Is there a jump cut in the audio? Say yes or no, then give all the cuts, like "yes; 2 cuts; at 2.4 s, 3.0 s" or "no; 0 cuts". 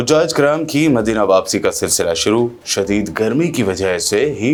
no; 0 cuts